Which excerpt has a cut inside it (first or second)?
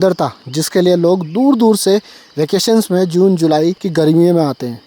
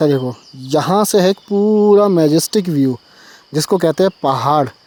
first